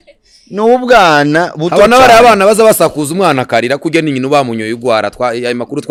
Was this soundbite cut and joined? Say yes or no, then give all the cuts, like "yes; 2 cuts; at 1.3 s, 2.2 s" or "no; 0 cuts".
no; 0 cuts